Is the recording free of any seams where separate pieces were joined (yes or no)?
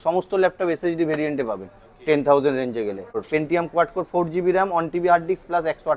no